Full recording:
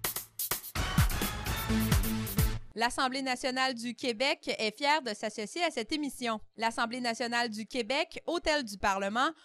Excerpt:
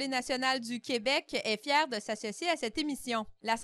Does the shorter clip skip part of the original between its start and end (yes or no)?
no